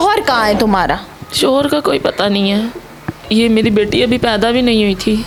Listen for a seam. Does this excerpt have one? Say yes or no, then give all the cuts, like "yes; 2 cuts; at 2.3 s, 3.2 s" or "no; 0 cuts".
no; 0 cuts